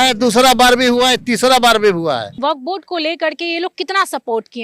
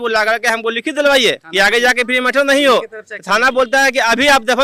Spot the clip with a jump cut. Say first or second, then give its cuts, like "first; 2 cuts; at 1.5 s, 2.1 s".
first; 1 cut; at 2.3 s